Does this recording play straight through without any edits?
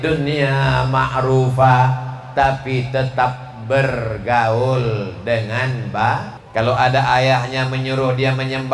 no; 1 cut; at 6.4 s

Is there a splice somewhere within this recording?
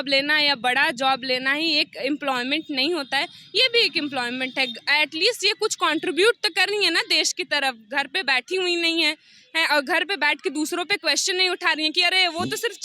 no; 0 cuts

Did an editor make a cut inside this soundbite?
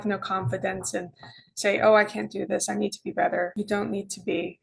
no; 0 cuts

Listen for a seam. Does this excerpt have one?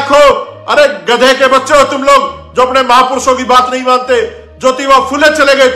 yes; 1 cut; at 3.0 s

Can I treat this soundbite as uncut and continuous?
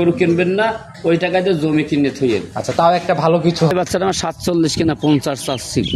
no; 1 cut; at 3.7 s

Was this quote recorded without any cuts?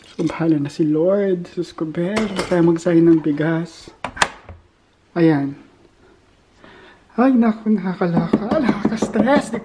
yes; 0 cuts

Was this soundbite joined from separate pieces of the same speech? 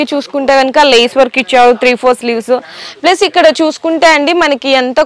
no; 0 cuts

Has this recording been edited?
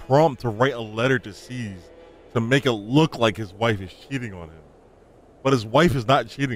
no; 0 cuts

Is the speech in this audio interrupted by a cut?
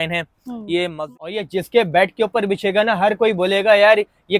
yes; 1 cut; at 0.9 s

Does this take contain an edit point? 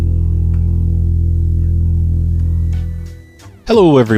yes; 1 cut; at 3.1 s

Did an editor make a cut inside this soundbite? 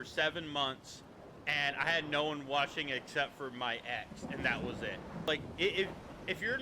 yes; 1 cut; at 5.3 s

